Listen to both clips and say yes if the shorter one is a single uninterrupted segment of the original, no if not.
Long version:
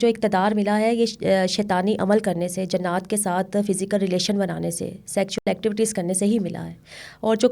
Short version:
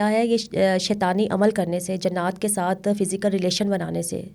yes